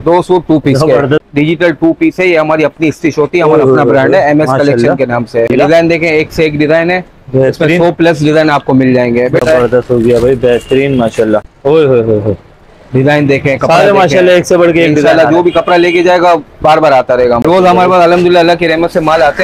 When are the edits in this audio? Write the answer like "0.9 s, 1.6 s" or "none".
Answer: 1.2 s, 5.5 s, 9.4 s, 11.5 s, 17.4 s